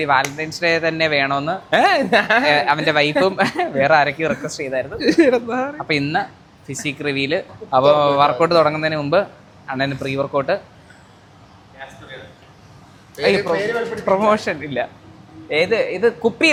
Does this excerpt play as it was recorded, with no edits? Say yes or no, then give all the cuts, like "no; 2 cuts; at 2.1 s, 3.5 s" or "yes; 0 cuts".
yes; 0 cuts